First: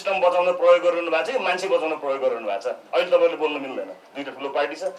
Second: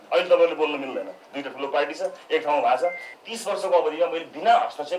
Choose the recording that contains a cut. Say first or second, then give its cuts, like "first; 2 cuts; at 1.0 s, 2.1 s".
second; 1 cut; at 3.1 s